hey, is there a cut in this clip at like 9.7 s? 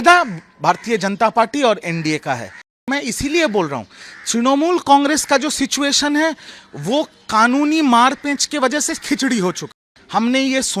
yes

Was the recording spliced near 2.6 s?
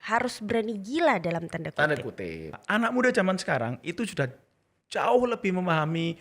yes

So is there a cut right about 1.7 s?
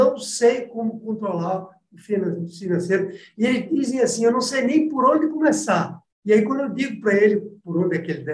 no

